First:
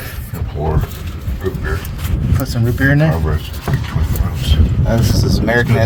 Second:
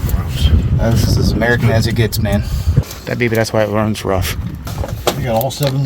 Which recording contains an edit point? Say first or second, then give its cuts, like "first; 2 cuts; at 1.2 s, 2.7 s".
second; 2 cuts; at 2.9 s, 4.7 s